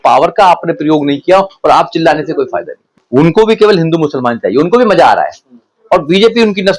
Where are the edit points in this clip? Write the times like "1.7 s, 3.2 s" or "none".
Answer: 2.9 s